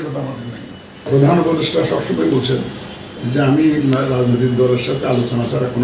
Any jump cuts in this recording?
yes; 1 cut; at 1.1 s

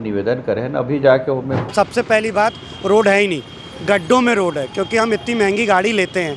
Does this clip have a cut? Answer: yes; 1 cut; at 1.6 s

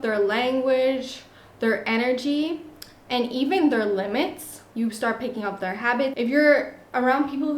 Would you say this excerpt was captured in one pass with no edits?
no; 1 cut; at 6.1 s

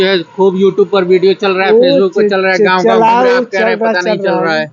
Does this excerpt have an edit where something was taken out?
no; 0 cuts

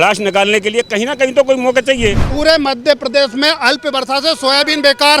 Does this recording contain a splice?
yes; 1 cut; at 2.3 s

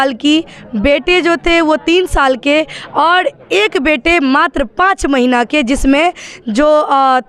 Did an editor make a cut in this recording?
no; 0 cuts

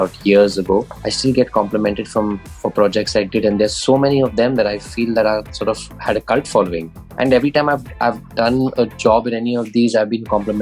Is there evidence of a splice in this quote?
yes; 3 cuts; at 1.0 s, 5.9 s, 7.0 s

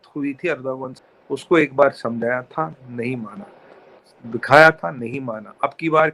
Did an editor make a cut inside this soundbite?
yes; 1 cut; at 0.9 s

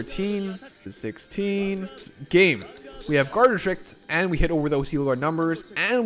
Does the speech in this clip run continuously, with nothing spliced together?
no; 2 cuts; at 0.9 s, 2.1 s

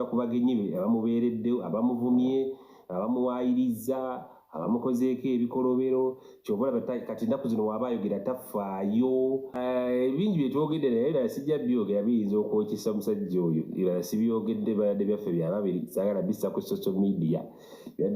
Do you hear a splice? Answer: yes; 1 cut; at 9.5 s

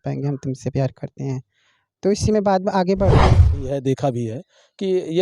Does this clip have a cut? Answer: yes; 1 cut; at 3.2 s

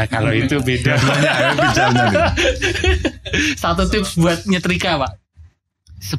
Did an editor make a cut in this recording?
no; 0 cuts

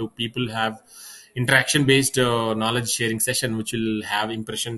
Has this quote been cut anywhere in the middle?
no; 0 cuts

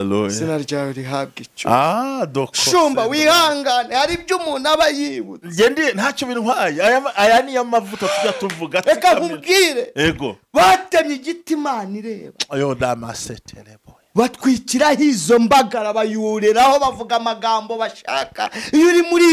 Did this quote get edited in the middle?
no; 0 cuts

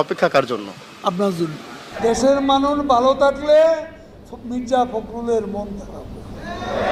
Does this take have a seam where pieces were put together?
no; 0 cuts

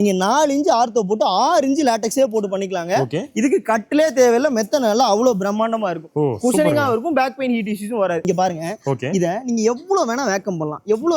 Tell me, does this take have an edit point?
yes; 1 cut; at 8.2 s

